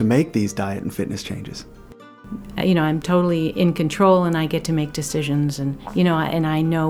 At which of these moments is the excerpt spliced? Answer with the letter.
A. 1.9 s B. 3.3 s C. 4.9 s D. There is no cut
A